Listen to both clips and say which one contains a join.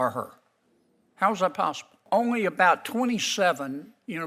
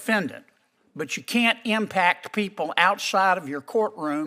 first; 1 cut; at 2.0 s

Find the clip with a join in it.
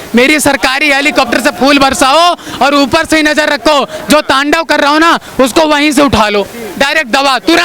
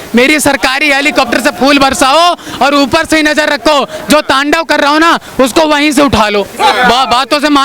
second; 1 cut; at 6.5 s

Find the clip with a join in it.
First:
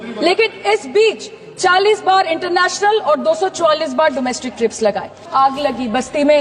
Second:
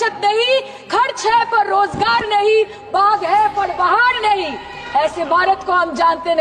first; 1 cut; at 5.2 s

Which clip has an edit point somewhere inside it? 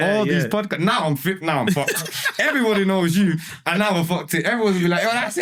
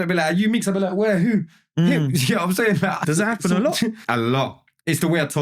second; 2 cuts; at 3.0 s, 4.0 s

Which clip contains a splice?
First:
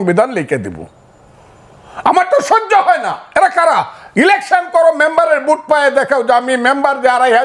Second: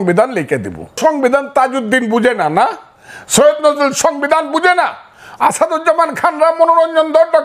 second; 1 cut; at 1.0 s

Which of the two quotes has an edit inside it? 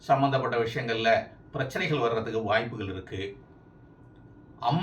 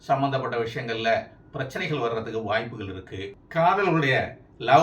second; 1 cut; at 3.4 s

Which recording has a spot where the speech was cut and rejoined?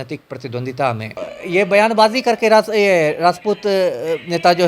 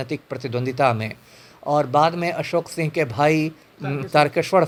first; 1 cut; at 1.3 s

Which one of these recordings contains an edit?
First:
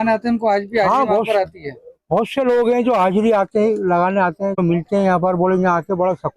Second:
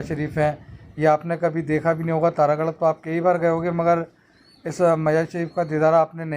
first; 1 cut; at 4.6 s

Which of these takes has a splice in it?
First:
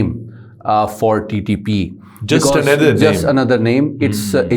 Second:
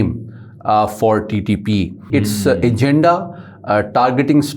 second; 1 cut; at 2.1 s

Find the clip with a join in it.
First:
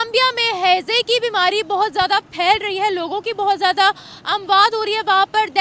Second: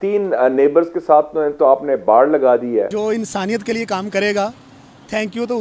second; 1 cut; at 2.9 s

